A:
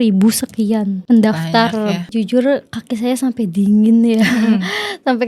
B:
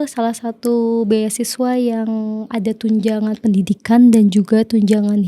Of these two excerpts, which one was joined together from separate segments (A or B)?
A